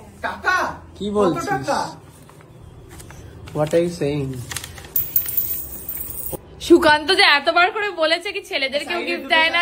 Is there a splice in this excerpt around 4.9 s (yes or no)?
no